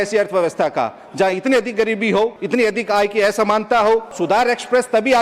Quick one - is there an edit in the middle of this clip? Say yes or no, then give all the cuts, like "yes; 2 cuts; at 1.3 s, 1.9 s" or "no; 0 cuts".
yes; 2 cuts; at 2.4 s, 4.1 s